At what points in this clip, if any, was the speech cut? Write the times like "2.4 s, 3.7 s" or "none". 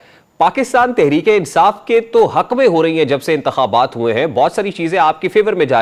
none